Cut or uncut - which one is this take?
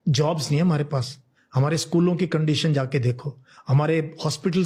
uncut